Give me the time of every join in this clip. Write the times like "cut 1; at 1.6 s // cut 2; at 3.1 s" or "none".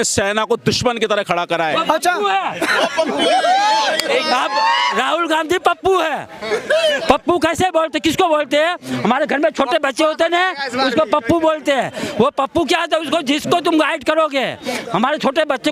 cut 1; at 1.6 s